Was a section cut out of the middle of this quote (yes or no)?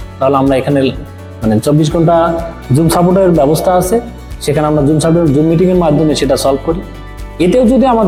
no